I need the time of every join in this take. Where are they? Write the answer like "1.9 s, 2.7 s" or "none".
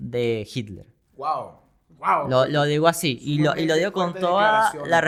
none

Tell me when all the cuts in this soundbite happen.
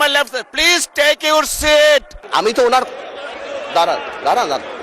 2.2 s

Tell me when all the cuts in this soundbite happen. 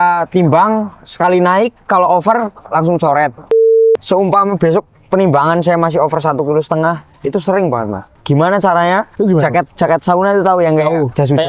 3.7 s, 8.1 s, 9.1 s

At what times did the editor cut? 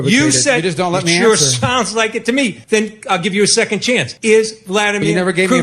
2.6 s, 4.1 s

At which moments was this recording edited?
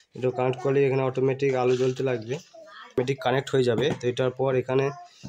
3.0 s

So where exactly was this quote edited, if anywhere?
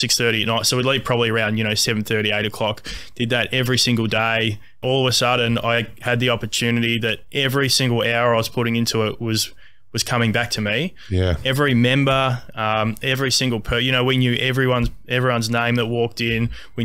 4.8 s

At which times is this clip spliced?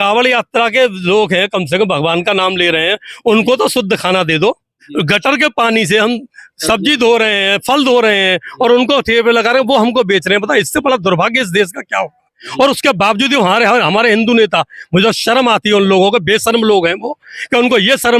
4.8 s

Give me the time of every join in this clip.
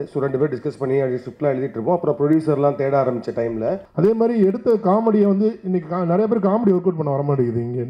3.9 s

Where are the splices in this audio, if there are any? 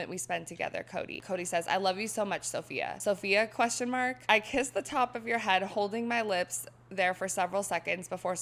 1.2 s, 2.9 s, 4.2 s

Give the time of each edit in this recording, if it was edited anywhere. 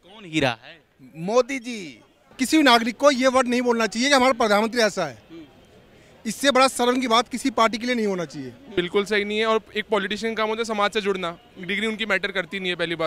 2.3 s, 8.7 s

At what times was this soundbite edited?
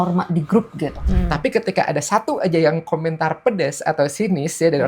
1.0 s

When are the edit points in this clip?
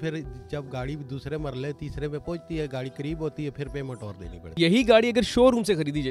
4.6 s

